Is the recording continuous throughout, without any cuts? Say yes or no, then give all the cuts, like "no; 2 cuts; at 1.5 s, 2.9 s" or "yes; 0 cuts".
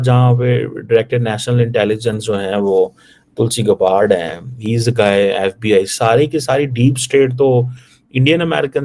yes; 0 cuts